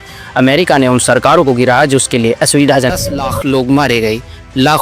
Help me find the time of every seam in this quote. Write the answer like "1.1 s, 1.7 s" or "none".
2.9 s